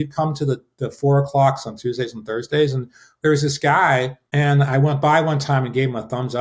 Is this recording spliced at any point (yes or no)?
yes